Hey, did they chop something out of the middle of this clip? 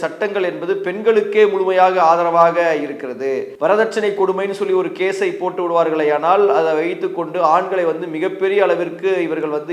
yes; 1 cut; at 3.5 s

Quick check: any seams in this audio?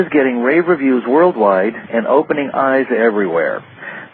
no; 0 cuts

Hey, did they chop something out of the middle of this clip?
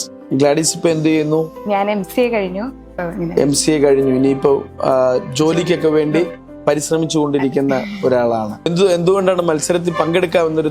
yes; 1 cut; at 8.7 s

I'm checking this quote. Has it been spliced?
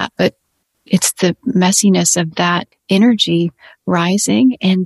no; 0 cuts

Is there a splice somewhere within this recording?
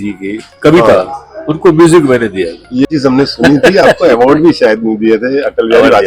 yes; 1 cut; at 2.9 s

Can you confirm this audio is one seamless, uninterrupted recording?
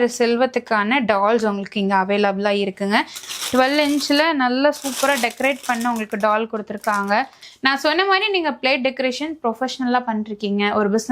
no; 2 cuts; at 3.2 s, 7.4 s

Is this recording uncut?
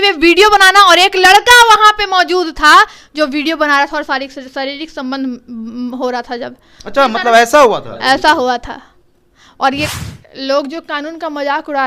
no; 1 cut; at 9.9 s

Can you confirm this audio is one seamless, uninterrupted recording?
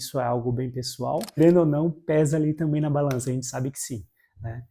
no; 1 cut; at 1.4 s

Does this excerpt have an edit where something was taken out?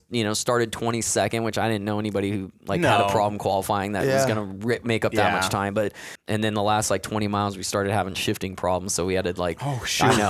yes; 1 cut; at 6.1 s

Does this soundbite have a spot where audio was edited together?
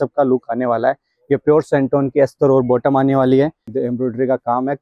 yes; 1 cut; at 3.7 s

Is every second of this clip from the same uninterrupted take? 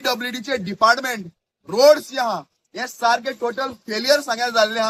yes; 0 cuts

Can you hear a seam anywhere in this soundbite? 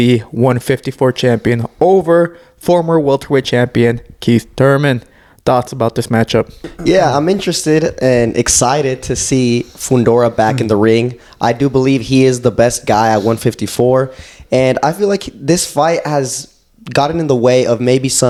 no; 0 cuts

